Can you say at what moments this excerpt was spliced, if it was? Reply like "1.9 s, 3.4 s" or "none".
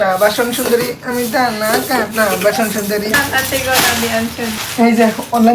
3.2 s, 4.6 s